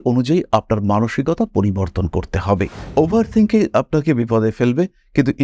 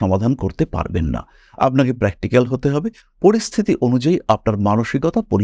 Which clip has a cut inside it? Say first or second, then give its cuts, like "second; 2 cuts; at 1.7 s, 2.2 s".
first; 1 cut; at 2.8 s